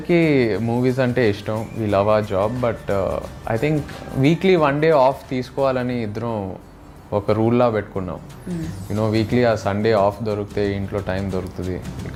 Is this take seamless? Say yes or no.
yes